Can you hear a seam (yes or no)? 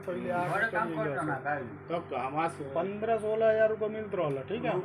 no